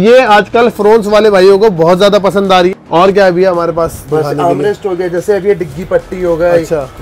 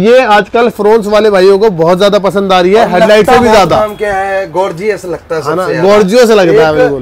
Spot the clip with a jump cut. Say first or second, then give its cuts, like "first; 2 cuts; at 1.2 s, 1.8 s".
first; 1 cut; at 2.7 s